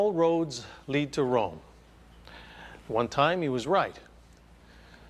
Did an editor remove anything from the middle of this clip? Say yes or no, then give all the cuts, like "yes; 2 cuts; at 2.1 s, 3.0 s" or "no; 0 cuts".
no; 0 cuts